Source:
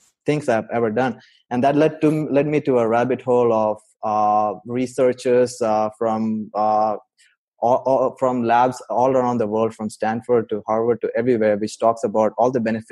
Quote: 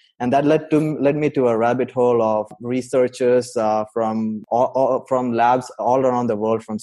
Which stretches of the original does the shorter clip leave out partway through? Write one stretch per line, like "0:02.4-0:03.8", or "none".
0:03.9-0:04.6
0:06.4-0:07.5